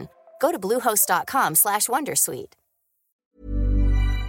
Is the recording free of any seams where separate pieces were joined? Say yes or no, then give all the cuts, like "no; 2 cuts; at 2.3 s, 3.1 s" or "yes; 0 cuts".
no; 1 cut; at 3.4 s